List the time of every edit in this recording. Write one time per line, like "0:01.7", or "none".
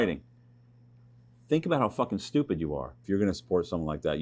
0:03.0